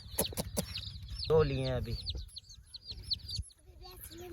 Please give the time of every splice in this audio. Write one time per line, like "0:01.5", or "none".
0:01.2